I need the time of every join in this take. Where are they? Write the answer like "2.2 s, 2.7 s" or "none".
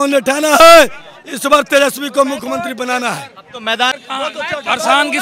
4.0 s